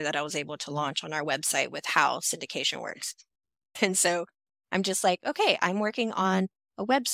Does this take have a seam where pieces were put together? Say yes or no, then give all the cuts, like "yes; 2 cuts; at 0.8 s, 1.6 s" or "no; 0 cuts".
yes; 1 cut; at 3.8 s